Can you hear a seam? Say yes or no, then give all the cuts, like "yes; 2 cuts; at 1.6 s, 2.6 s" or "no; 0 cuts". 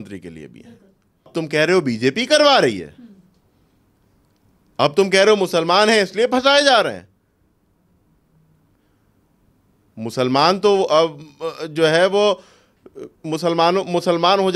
yes; 1 cut; at 1.3 s